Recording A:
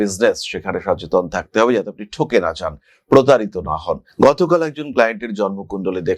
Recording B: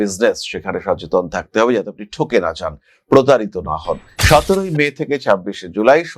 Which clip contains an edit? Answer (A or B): B